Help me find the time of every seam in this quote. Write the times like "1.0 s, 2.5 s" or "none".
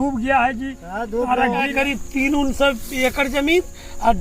1.7 s